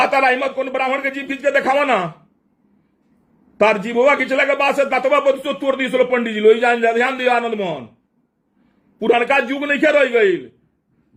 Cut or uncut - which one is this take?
uncut